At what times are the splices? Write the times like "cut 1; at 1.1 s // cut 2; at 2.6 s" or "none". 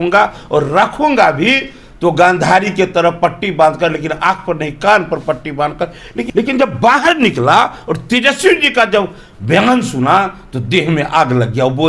cut 1; at 6.2 s